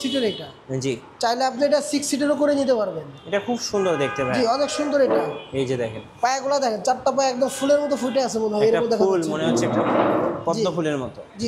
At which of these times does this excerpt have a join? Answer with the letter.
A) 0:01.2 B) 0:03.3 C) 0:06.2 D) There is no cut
D